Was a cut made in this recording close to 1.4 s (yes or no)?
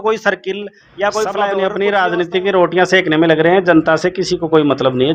yes